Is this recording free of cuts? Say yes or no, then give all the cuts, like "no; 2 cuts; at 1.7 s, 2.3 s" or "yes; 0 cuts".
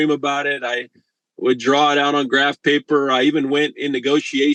yes; 0 cuts